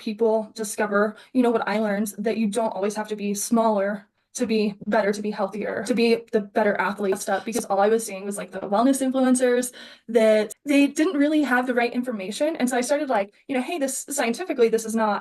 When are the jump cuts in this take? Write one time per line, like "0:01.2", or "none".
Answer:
0:07.2